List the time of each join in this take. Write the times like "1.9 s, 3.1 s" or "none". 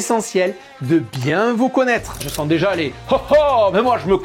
2.3 s